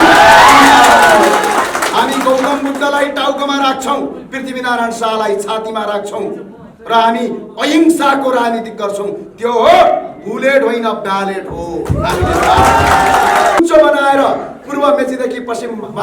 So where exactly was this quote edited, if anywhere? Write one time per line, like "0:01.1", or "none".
0:13.6